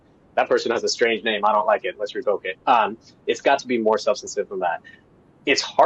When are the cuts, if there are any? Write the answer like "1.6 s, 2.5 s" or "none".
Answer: none